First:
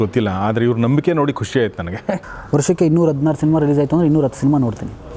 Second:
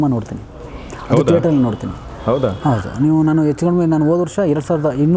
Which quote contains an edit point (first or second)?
first